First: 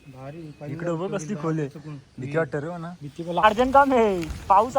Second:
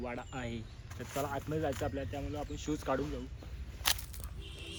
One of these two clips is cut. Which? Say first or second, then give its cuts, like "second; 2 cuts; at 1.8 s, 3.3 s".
first; 1 cut; at 3.4 s